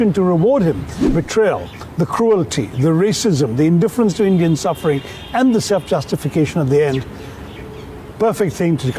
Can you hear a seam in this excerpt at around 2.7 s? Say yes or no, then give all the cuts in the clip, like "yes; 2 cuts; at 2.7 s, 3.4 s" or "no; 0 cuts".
no; 1 cut; at 1.1 s